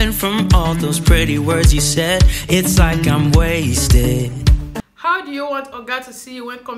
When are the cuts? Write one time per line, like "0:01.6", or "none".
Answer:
0:04.8